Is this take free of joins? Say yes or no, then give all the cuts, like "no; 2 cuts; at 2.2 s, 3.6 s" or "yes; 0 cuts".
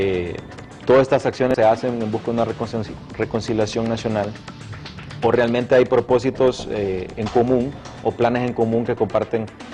yes; 0 cuts